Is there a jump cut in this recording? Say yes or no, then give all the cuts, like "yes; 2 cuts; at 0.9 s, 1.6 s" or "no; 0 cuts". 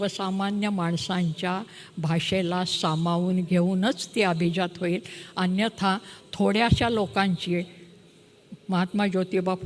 no; 0 cuts